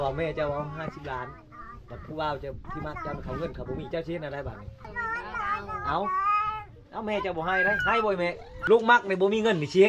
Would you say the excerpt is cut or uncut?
cut